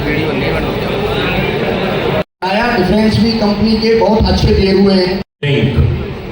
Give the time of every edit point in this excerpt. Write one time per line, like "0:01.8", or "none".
0:02.3
0:05.4